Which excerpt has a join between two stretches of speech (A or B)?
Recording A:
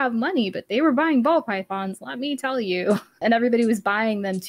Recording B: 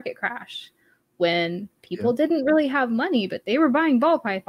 A